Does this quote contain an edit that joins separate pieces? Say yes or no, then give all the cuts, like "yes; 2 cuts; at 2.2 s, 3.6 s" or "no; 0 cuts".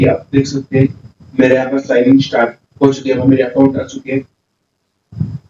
no; 0 cuts